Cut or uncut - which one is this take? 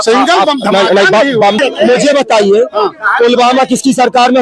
cut